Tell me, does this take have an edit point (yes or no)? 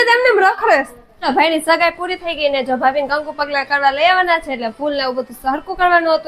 yes